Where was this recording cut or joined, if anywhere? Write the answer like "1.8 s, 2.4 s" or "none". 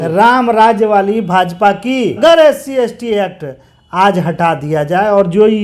2.2 s